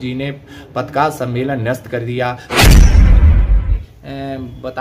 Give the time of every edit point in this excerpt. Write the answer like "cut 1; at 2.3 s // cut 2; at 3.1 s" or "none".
cut 1; at 2.4 s // cut 2; at 3.9 s